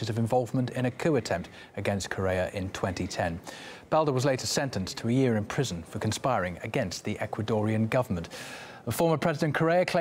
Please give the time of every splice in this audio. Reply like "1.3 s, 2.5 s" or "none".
3.1 s